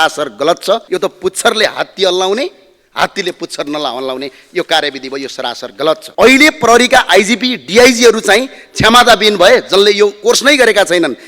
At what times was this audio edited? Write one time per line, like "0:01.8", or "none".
0:00.8
0:06.1